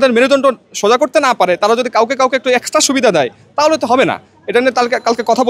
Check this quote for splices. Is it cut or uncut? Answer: uncut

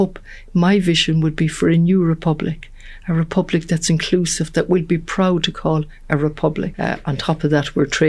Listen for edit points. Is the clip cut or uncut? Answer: cut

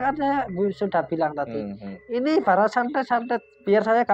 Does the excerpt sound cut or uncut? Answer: uncut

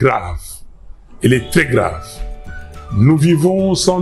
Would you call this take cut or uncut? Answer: uncut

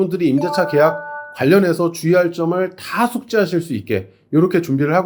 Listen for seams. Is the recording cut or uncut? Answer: uncut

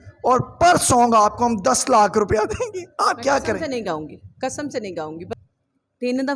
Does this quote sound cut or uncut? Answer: cut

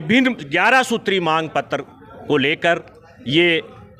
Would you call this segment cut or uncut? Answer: uncut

